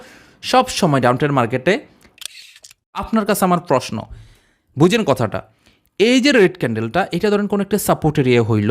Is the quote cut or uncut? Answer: cut